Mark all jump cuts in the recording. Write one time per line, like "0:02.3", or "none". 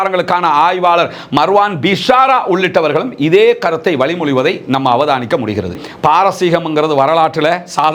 0:05.7